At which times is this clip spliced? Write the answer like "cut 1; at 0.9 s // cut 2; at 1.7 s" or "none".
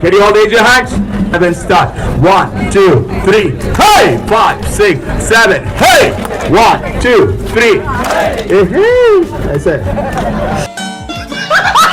none